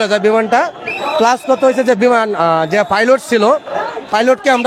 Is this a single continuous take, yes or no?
yes